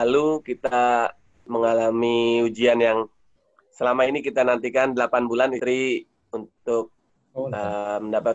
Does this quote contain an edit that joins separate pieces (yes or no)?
no